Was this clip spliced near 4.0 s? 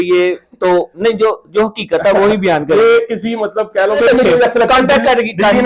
yes; 1 cut; at 4.0 s

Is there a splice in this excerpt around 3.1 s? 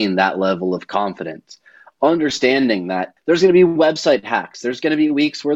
yes; 1 cut; at 3.1 s

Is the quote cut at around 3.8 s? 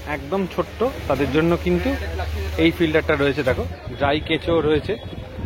yes; 1 cut; at 3.8 s

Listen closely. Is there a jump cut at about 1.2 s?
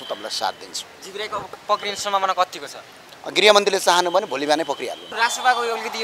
no; 1 cut; at 5.0 s

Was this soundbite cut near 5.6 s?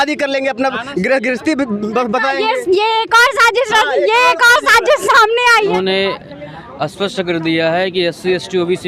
yes; 1 cut; at 5.6 s

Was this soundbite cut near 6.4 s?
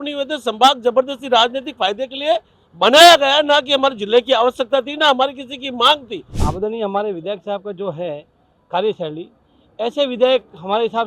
yes; 1 cut; at 6.4 s

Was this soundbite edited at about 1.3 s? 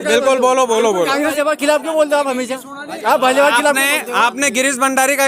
yes; 1 cut; at 1.3 s

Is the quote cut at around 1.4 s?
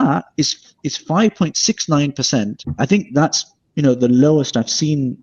no; 1 cut; at 2.6 s

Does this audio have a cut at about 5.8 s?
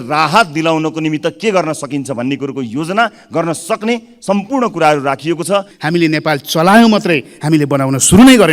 yes; 1 cut; at 5.8 s

